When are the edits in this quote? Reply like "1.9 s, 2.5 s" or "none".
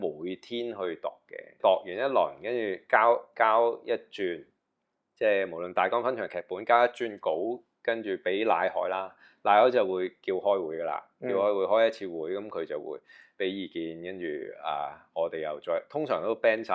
1.6 s